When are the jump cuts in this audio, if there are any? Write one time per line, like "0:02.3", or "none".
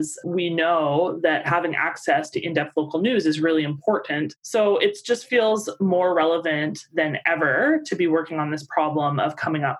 0:04.4

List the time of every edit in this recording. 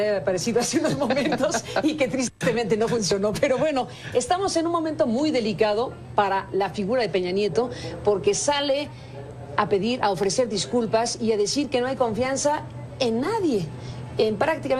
0:06.8

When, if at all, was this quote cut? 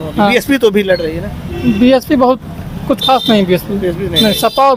none

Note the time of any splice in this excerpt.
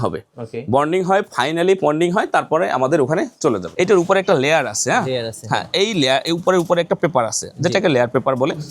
0:03.7

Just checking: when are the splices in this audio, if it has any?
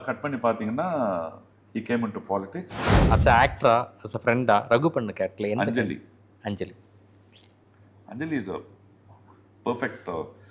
0:02.9

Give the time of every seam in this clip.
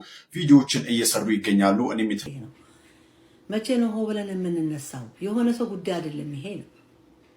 0:02.2

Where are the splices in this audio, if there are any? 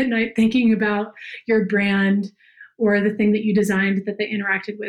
none

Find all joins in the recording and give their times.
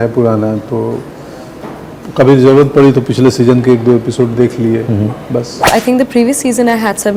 0:05.6

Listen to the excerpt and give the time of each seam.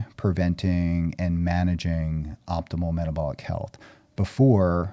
none

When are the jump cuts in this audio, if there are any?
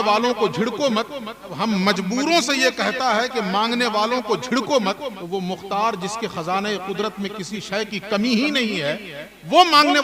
0:01.4
0:05.2

